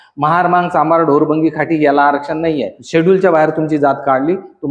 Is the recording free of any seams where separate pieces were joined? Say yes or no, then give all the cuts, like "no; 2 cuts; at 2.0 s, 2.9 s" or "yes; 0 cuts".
no; 1 cut; at 2.7 s